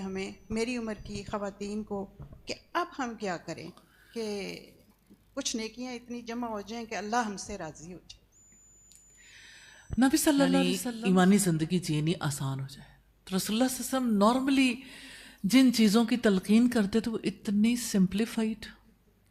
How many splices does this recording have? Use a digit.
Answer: 1